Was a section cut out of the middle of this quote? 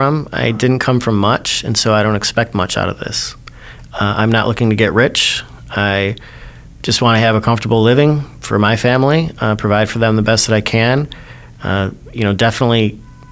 no; 0 cuts

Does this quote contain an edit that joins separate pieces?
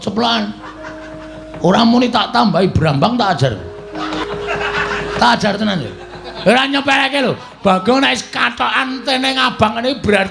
yes; 1 cut; at 4.2 s

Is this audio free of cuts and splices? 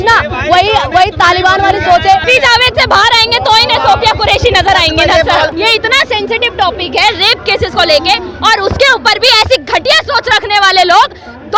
no; 2 cuts; at 2.2 s, 5.5 s

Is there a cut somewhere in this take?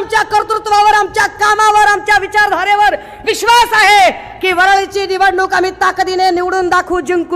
no; 0 cuts

